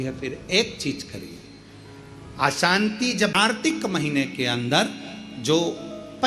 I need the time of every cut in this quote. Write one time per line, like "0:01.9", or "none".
0:03.4